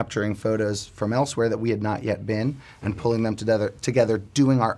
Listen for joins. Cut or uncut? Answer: uncut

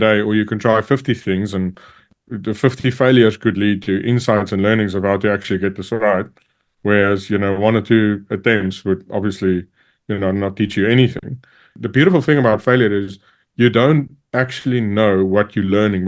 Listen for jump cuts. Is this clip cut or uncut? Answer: cut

